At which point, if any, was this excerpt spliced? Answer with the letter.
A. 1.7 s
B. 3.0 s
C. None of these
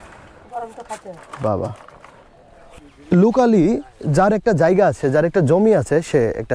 B